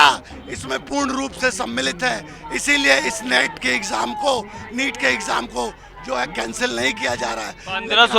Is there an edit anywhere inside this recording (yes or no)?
no